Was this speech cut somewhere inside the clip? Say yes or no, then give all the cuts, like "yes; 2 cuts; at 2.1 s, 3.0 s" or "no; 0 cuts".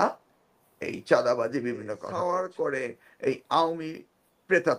yes; 1 cut; at 2.0 s